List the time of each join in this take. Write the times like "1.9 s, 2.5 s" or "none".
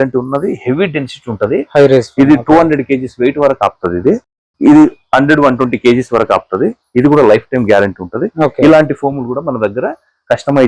none